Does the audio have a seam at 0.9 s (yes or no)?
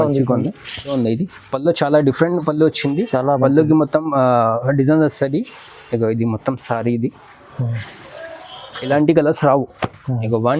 yes